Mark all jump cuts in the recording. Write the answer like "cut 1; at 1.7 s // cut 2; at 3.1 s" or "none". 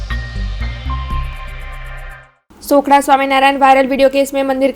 cut 1; at 1.3 s